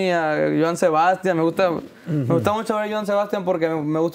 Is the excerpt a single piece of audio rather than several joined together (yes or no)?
yes